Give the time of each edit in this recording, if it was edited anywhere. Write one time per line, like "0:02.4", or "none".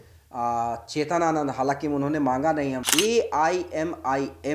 0:02.8